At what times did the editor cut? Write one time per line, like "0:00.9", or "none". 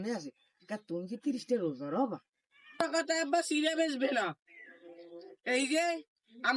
0:02.9